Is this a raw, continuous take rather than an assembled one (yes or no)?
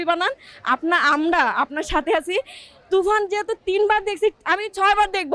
no